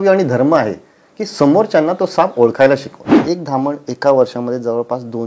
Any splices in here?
yes; 1 cut; at 3.1 s

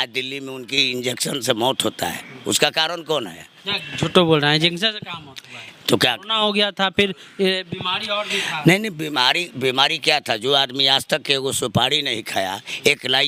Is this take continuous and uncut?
yes; 0 cuts

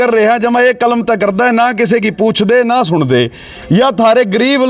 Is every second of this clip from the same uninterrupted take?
yes; 0 cuts

